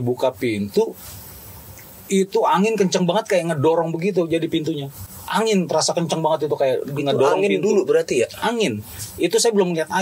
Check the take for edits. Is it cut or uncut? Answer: uncut